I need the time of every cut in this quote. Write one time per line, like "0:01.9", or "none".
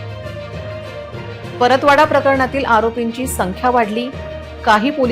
0:01.5